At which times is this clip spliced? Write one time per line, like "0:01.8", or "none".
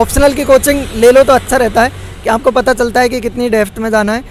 none

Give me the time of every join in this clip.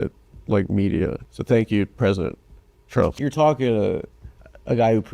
0:01.2
0:03.2

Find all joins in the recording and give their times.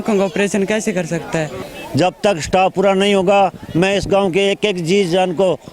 0:01.6

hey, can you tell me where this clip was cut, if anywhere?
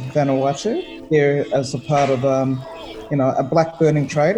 0:00.9

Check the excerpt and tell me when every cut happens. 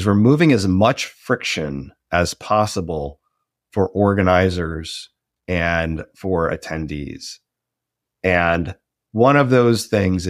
none

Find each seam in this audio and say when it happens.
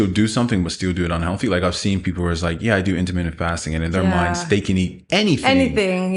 none

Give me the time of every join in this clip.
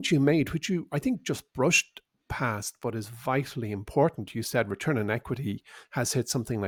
none

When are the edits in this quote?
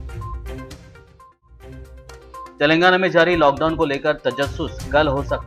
0:02.1

